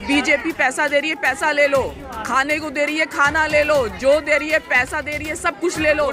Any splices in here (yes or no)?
no